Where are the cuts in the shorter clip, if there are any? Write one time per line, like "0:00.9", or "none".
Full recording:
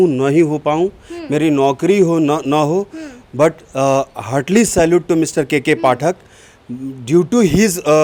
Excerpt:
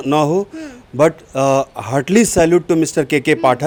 none